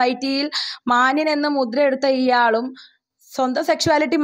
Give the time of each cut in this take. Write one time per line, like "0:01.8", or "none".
none